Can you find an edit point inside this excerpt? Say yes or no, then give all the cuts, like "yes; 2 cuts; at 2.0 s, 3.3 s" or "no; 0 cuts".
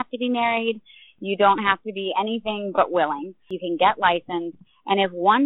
no; 0 cuts